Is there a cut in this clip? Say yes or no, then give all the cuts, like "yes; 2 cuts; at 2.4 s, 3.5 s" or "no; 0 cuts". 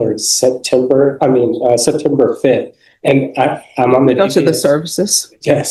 no; 0 cuts